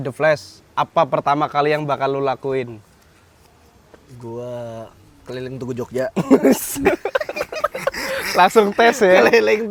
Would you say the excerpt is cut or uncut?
uncut